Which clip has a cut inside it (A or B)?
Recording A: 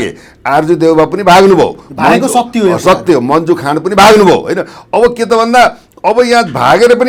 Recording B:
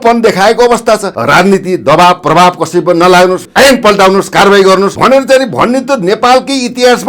B